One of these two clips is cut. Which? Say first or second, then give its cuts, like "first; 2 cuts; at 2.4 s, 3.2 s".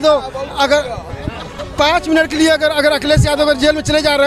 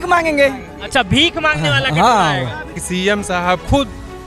second; 1 cut; at 2.8 s